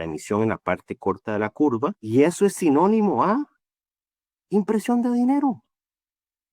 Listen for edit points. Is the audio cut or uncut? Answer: cut